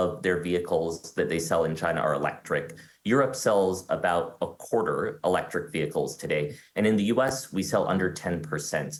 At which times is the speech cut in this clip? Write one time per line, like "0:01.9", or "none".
none